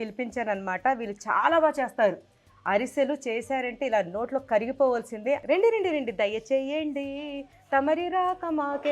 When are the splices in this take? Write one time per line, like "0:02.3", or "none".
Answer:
0:05.4